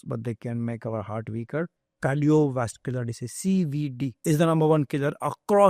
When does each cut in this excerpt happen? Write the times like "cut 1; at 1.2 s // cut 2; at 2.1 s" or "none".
cut 1; at 1.8 s // cut 2; at 4.2 s